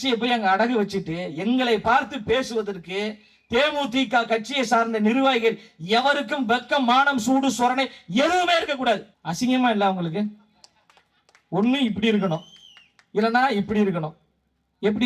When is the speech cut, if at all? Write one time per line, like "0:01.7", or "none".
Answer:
0:09.2